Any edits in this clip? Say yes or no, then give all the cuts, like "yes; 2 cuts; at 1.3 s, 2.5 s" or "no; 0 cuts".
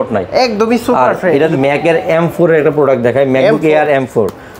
yes; 1 cut; at 1.6 s